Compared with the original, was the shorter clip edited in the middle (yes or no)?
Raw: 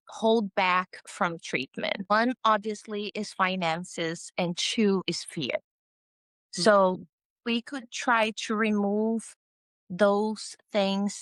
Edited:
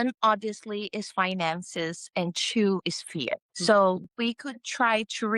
yes